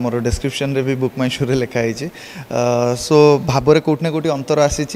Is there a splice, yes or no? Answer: no